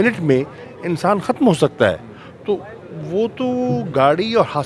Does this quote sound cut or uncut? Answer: uncut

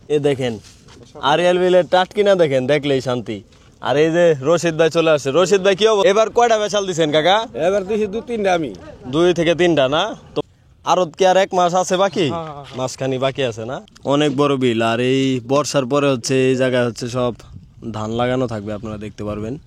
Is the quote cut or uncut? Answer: cut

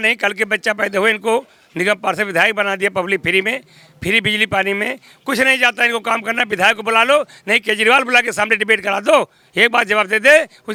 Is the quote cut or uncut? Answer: uncut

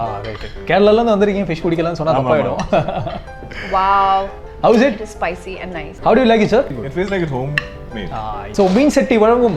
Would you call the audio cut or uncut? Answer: cut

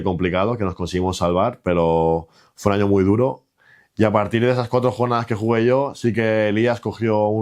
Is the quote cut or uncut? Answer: uncut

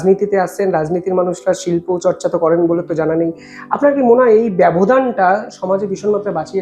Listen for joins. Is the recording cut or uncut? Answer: uncut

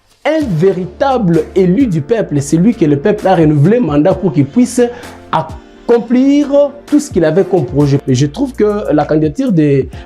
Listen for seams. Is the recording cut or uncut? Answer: cut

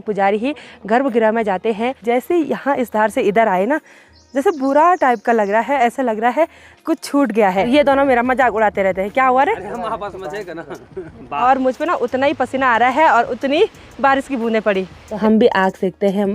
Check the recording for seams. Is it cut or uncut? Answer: cut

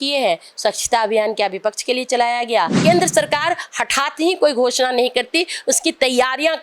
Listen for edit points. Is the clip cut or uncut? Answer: cut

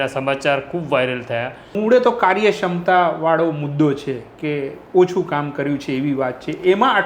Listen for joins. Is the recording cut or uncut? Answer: cut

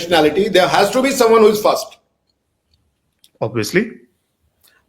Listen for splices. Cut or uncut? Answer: uncut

